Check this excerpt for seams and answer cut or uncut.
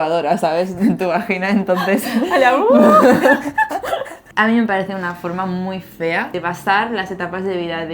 cut